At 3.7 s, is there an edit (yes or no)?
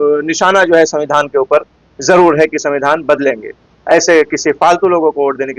yes